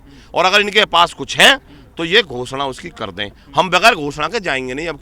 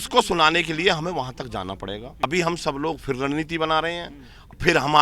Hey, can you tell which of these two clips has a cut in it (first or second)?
second